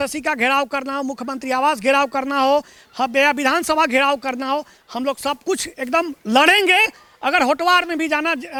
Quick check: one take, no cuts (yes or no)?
yes